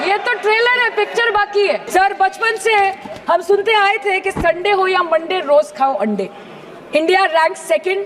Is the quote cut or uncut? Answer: cut